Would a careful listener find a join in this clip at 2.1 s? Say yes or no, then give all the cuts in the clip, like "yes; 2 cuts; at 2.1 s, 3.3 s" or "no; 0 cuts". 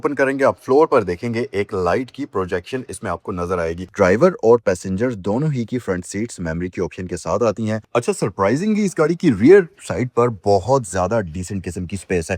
no; 2 cuts; at 3.9 s, 7.8 s